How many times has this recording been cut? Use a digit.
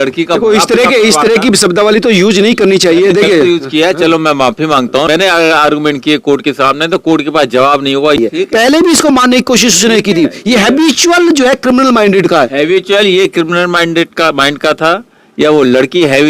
2